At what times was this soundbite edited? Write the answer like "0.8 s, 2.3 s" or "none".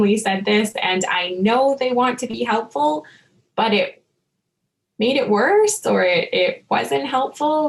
none